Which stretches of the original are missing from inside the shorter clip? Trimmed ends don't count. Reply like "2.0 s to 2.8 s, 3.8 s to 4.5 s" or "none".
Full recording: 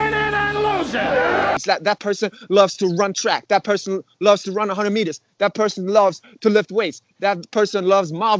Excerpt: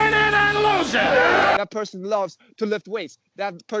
1.6 s to 5.4 s